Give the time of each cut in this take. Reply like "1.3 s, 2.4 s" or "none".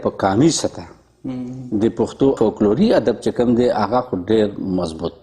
2.4 s